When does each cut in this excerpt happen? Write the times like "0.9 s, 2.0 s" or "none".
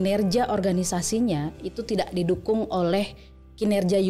none